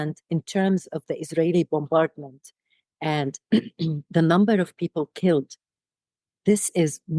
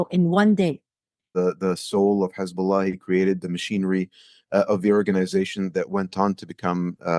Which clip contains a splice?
second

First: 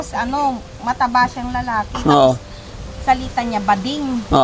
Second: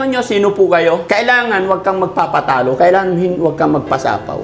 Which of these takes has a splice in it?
second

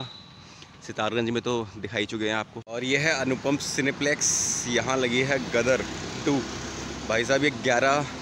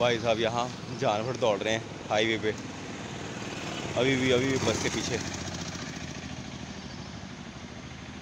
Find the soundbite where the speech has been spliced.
first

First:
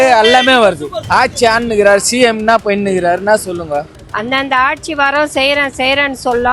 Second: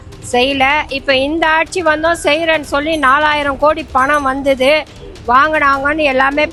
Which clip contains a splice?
first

